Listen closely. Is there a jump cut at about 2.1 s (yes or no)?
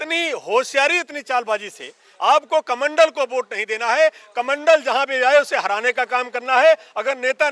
yes